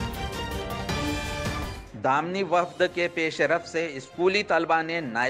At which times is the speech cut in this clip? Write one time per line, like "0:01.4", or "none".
0:01.8